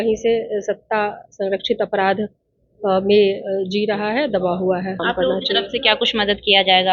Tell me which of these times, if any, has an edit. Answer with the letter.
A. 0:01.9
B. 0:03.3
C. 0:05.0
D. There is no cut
C